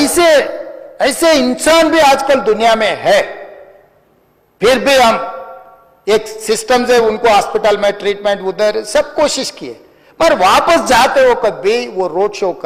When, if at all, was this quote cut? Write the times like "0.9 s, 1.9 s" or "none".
none

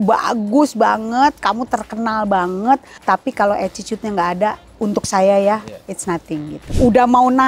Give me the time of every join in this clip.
2.9 s, 6.7 s

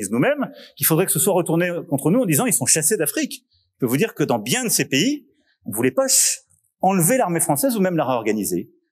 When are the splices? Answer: none

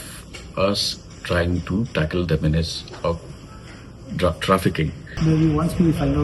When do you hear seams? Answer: 5.2 s

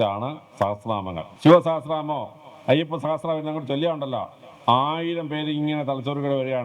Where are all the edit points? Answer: 1.3 s

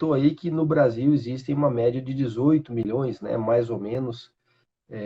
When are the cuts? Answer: none

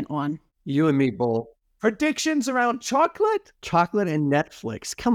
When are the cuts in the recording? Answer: 3.5 s

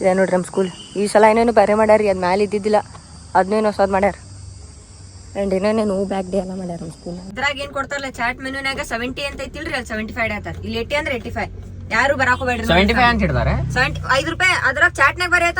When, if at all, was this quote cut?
7.3 s

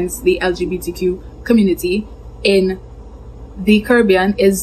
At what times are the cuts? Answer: none

